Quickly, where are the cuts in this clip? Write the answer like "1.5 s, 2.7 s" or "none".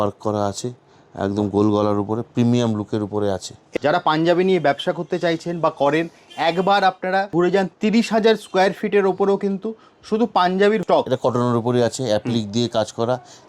3.6 s, 7.3 s, 10.9 s